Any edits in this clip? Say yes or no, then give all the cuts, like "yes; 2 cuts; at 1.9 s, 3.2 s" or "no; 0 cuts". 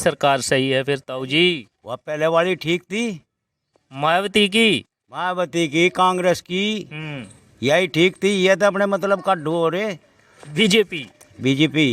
no; 0 cuts